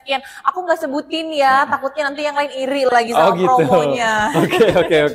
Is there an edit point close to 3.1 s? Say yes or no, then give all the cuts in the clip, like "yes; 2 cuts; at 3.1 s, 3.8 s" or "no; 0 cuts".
no; 0 cuts